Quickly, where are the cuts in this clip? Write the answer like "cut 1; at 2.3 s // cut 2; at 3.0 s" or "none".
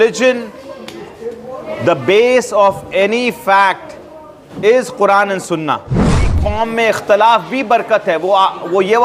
cut 1; at 6.3 s